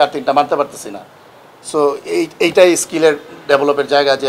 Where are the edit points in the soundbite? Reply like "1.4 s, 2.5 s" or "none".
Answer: none